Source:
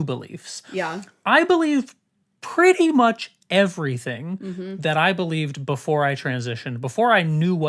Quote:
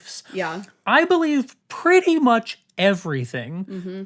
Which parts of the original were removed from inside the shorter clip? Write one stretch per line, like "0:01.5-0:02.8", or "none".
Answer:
0:02.0-0:02.4